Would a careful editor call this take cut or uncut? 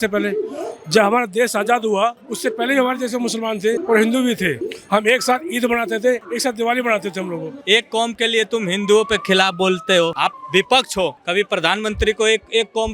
cut